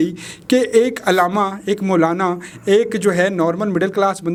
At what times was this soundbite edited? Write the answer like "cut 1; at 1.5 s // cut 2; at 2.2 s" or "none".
none